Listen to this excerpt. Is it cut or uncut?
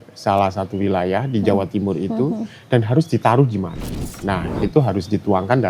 cut